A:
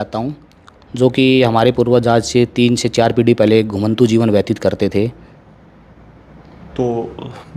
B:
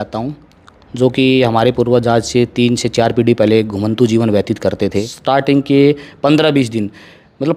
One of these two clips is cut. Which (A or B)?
B